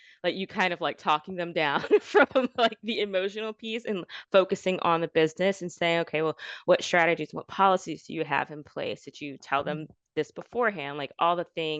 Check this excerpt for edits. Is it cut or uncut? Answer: uncut